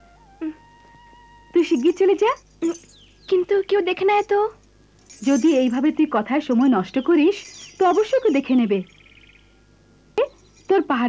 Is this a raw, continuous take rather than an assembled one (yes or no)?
no